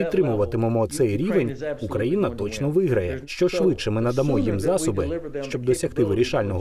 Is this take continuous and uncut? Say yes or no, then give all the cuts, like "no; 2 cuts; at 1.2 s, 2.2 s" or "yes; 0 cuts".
no; 1 cut; at 3.2 s